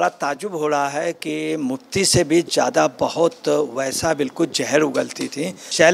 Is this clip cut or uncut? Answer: uncut